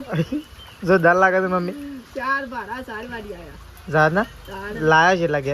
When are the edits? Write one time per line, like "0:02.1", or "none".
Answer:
none